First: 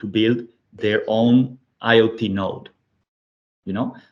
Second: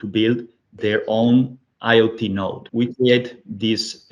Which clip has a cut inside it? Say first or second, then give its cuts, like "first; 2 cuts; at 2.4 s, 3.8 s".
second; 1 cut; at 2.7 s